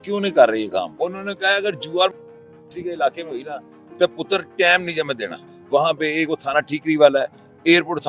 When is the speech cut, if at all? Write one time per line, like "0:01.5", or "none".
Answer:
0:00.9
0:05.5